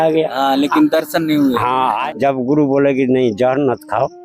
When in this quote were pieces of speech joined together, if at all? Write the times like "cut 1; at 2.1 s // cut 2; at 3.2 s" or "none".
cut 1; at 2.0 s